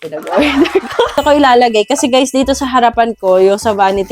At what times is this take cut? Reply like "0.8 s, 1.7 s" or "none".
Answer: 1.2 s